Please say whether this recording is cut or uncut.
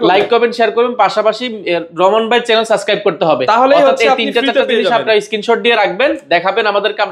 uncut